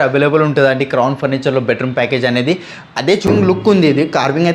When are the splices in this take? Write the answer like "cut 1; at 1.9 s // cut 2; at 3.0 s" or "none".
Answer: cut 1; at 3.3 s